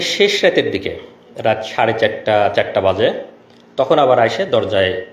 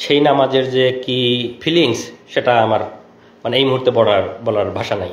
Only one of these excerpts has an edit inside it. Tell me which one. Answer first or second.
second